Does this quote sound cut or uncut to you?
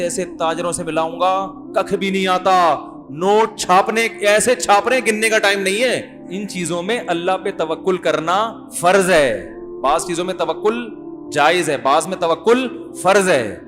cut